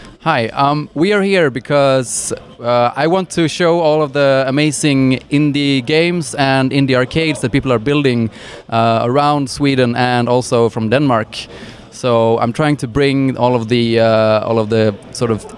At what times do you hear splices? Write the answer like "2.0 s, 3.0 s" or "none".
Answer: 3.3 s